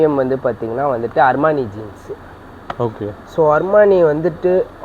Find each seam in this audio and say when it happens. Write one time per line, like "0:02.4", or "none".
none